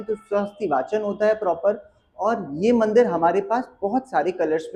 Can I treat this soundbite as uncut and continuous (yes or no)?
yes